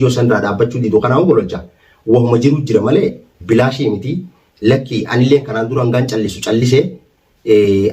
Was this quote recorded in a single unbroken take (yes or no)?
yes